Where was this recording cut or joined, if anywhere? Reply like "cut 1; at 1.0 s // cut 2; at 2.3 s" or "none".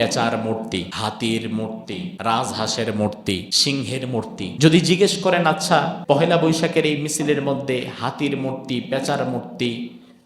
cut 1; at 0.9 s // cut 2; at 2.1 s // cut 3; at 3.5 s // cut 4; at 4.5 s // cut 5; at 6.0 s